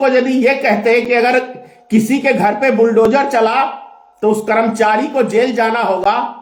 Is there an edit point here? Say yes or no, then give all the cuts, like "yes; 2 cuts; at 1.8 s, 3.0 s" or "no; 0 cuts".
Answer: no; 0 cuts